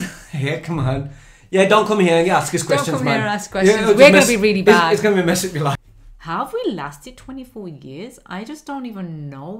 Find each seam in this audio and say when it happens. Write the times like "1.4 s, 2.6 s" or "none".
5.8 s